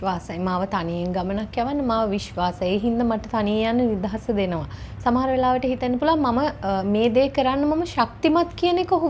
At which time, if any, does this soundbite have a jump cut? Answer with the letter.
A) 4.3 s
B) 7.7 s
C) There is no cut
C